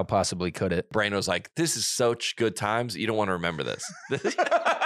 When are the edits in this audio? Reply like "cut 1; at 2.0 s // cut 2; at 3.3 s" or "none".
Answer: cut 1; at 0.9 s